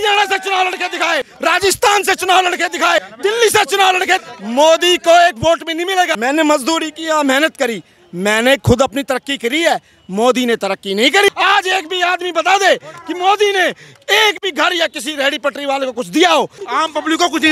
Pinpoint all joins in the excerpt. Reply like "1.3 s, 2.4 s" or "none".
1.3 s, 3.1 s, 4.2 s, 6.1 s, 11.3 s, 16.6 s